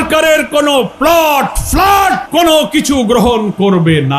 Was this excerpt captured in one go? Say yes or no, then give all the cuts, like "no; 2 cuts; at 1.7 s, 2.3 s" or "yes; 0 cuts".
no; 1 cut; at 2.2 s